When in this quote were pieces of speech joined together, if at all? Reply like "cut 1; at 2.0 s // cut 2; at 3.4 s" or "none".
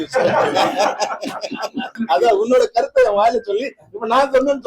cut 1; at 2.0 s